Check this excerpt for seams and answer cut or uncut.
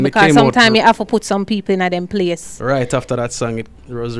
uncut